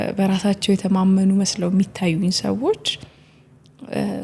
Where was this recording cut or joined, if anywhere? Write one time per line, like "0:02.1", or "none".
none